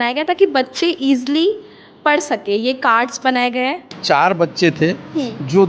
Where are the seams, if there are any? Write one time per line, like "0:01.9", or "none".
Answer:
0:03.9